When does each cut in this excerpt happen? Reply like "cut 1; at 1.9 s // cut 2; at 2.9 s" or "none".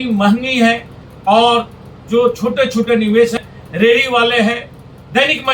cut 1; at 3.4 s